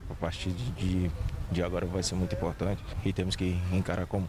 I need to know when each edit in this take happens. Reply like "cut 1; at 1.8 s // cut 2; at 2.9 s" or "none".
cut 1; at 2.9 s